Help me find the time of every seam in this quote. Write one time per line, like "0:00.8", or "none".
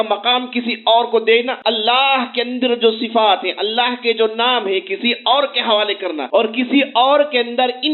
0:01.5
0:06.2